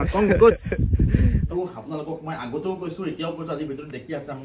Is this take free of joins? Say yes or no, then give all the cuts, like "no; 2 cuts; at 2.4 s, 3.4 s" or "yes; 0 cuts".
no; 1 cut; at 1.5 s